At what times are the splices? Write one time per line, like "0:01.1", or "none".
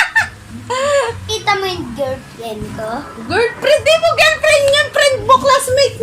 0:01.3